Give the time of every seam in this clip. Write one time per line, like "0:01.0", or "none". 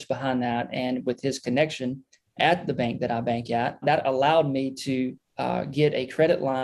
0:03.8